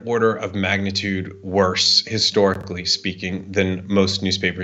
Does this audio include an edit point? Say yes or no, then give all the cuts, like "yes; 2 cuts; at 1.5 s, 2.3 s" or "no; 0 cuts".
no; 0 cuts